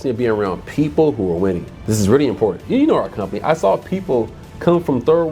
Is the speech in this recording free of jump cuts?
no; 2 cuts; at 1.7 s, 2.6 s

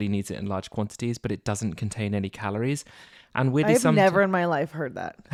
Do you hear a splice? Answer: no; 0 cuts

